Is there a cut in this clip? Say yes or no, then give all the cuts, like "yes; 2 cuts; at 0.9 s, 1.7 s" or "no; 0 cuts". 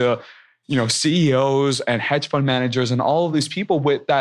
yes; 1 cut; at 3.3 s